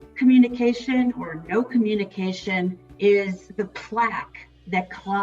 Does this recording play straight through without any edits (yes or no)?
no